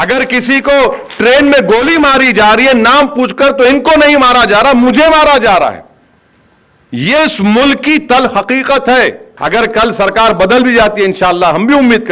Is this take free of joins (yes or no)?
no